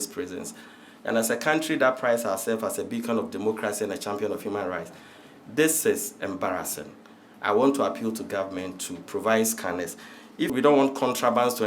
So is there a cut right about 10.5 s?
yes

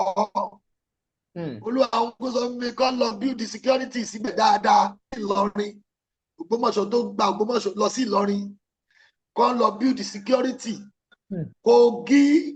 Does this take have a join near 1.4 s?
no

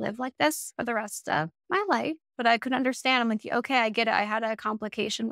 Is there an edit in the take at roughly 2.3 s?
yes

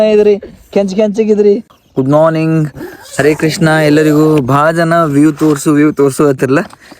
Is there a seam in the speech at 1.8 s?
yes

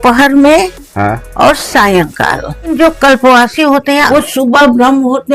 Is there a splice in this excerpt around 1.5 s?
no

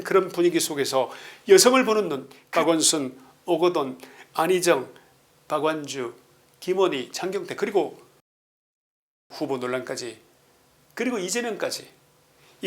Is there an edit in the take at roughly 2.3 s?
yes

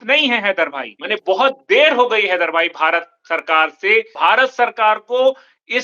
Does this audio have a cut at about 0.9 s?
yes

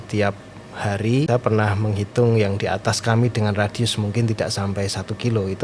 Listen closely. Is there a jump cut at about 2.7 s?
no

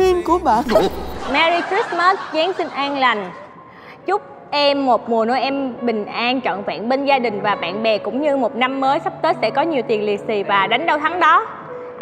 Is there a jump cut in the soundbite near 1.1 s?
yes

